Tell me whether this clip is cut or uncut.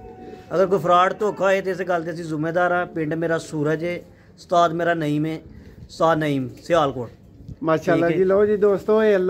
uncut